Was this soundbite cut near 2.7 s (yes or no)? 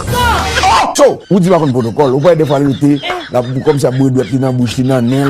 no